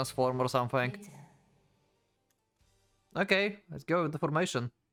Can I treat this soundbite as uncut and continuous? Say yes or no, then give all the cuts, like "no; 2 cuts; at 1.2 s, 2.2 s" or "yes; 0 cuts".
yes; 0 cuts